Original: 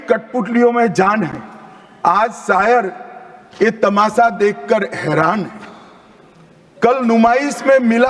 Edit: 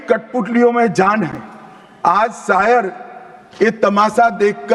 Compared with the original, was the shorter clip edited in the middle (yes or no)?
no